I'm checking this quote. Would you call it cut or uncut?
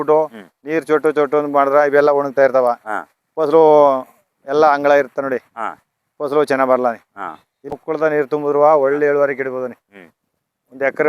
cut